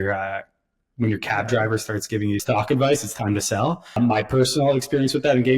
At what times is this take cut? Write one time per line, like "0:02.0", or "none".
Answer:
0:02.4
0:04.0

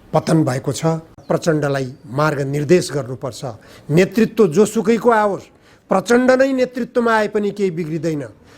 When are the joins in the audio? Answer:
0:01.1

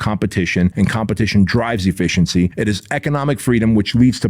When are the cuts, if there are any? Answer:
0:00.7
0:02.5

